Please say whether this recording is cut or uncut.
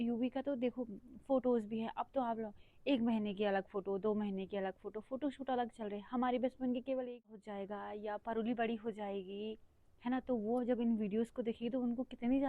cut